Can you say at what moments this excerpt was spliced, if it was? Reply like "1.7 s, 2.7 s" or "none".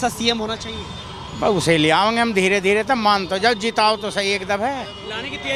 none